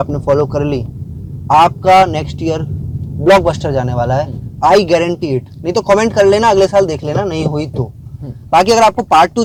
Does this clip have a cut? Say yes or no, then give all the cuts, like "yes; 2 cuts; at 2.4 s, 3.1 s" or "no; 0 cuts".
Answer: no; 0 cuts